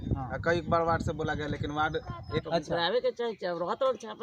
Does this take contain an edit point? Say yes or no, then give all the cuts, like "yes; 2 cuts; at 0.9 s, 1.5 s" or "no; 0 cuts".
yes; 1 cut; at 2.4 s